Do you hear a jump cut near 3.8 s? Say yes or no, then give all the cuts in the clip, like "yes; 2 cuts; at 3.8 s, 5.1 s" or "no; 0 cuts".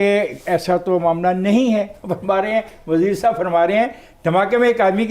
no; 1 cut; at 2.0 s